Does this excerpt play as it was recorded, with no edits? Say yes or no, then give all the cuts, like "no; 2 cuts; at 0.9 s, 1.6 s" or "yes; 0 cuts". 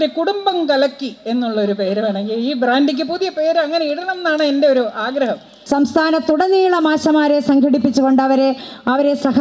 no; 1 cut; at 5.6 s